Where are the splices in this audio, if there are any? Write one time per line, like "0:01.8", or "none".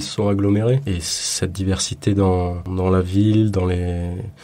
0:00.9
0:02.6

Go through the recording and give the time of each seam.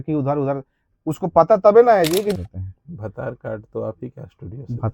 0:02.4

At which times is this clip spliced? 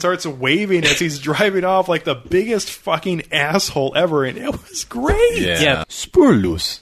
0:05.8

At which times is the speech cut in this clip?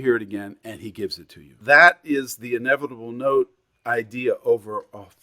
0:01.6

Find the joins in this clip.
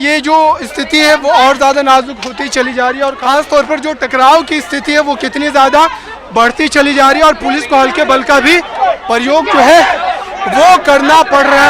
0:03.2

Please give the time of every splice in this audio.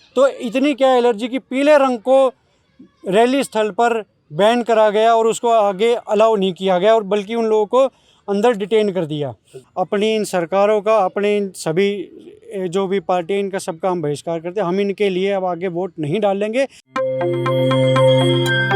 0:09.6
0:16.8

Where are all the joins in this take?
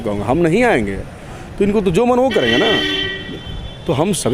none

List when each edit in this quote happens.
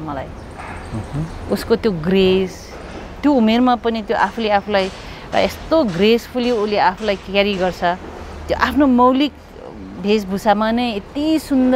none

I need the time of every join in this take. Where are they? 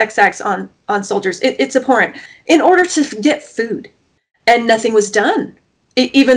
0:02.2
0:04.1

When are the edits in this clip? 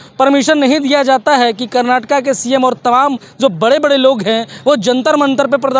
none

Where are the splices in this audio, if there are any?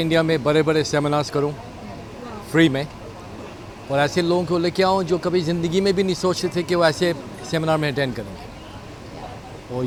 none

